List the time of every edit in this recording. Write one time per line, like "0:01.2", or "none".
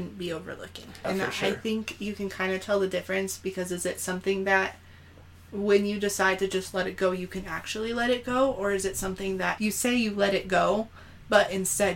0:01.1
0:09.5